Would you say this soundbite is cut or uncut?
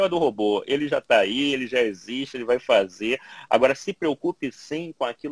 uncut